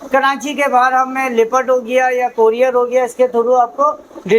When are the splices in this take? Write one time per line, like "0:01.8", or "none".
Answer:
none